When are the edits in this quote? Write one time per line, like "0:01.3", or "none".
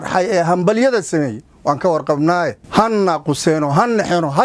0:02.6